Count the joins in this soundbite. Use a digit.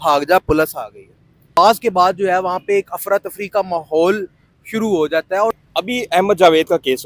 2